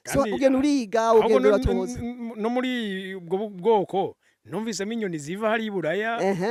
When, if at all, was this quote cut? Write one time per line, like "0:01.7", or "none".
none